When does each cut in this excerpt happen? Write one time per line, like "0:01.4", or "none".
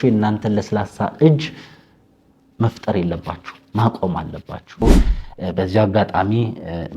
0:04.8